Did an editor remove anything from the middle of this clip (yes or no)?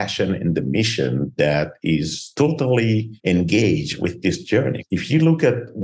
yes